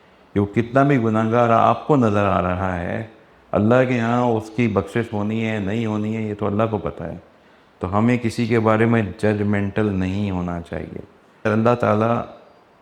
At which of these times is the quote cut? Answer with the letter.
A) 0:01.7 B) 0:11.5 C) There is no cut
B